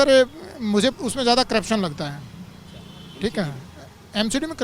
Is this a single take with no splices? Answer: yes; 0 cuts

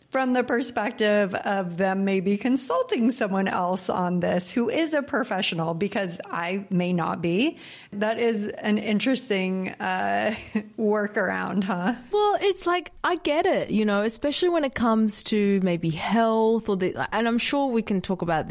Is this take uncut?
no; 2 cuts; at 7.9 s, 12.1 s

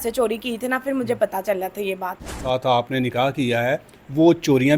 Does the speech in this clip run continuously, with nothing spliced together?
no; 1 cut; at 2.4 s

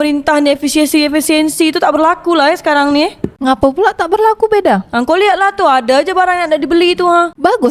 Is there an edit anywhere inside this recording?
no; 0 cuts

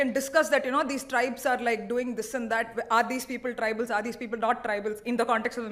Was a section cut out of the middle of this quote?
no; 0 cuts

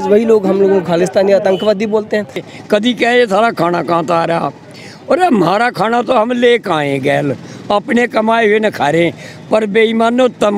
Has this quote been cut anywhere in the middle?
yes; 1 cut; at 2.4 s

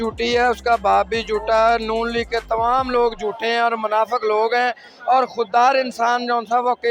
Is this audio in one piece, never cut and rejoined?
yes; 0 cuts

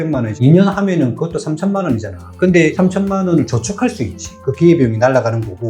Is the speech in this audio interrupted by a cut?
yes; 1 cut; at 2.7 s

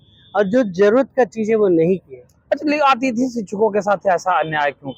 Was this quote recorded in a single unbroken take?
yes; 0 cuts

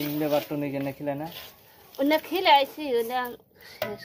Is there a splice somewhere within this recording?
no; 0 cuts

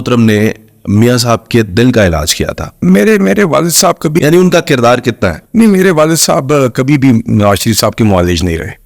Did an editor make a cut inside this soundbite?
yes; 1 cut; at 2.8 s

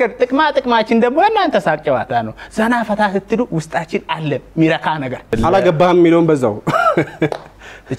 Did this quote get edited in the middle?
yes; 1 cut; at 5.3 s

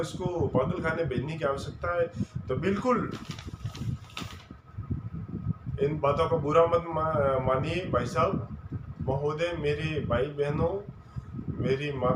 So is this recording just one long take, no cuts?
yes; 0 cuts

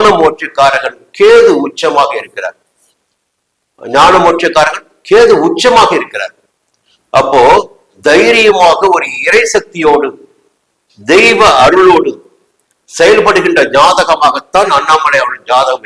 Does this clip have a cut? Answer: no; 0 cuts

